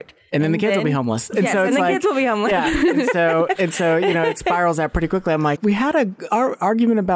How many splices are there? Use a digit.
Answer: 1